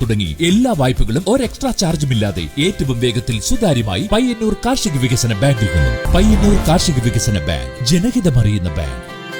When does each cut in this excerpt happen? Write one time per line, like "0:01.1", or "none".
0:06.0